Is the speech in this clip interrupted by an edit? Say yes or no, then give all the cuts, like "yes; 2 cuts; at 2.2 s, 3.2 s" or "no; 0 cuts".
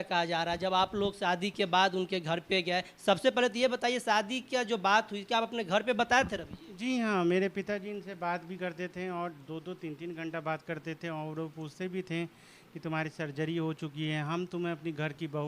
no; 0 cuts